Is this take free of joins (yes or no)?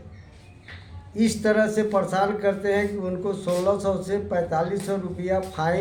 yes